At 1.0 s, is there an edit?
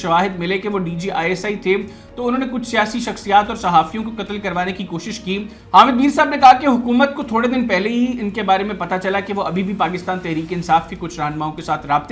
no; 1 cut; at 5.6 s

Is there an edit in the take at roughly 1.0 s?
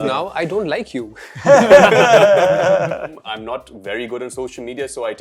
no; 1 cut; at 3.2 s

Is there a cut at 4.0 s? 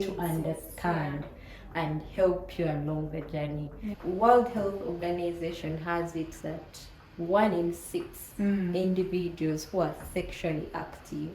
yes; 1 cut; at 4.0 s

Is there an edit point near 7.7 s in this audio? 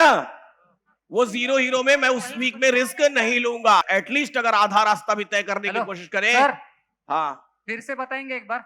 no; 1 cut; at 3.8 s

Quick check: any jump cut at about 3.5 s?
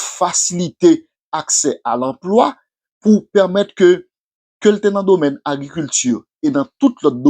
yes; 1 cut; at 3.5 s

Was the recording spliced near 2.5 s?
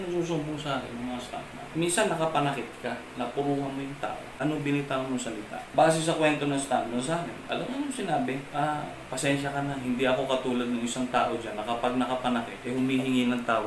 no; 5 cuts; at 4.3 s, 5.6 s, 7.4 s, 8.5 s, 12.6 s

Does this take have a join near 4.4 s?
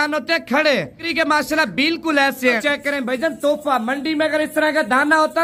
no; 2 cuts; at 1.0 s, 2.6 s

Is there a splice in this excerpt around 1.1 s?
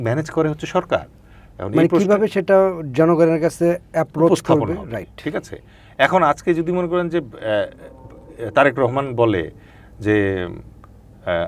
no; 0 cuts

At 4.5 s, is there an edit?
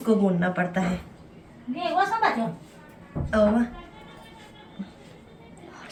no; 0 cuts

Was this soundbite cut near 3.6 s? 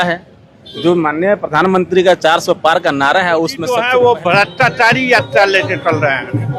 yes; 1 cut; at 3.6 s

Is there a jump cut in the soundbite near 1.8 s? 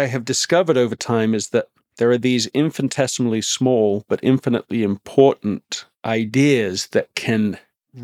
yes; 1 cut; at 1.8 s

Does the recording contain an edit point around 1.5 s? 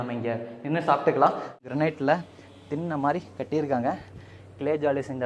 yes; 1 cut; at 1.5 s

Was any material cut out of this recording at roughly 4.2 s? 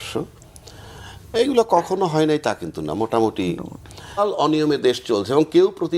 yes; 1 cut; at 4.2 s

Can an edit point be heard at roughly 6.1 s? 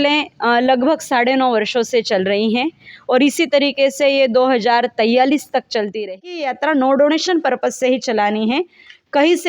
yes; 1 cut; at 6.1 s

